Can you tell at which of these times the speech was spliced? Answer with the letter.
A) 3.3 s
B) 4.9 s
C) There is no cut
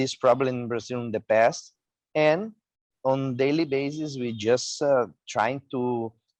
C